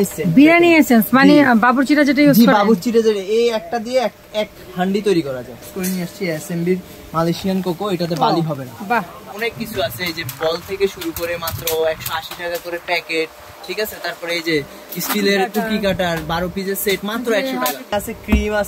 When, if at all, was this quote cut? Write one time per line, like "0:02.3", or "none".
0:05.6
0:09.3
0:17.9